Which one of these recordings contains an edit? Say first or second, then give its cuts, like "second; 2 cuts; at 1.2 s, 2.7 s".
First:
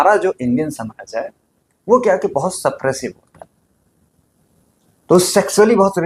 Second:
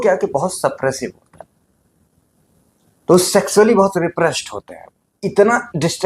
second; 1 cut; at 5.1 s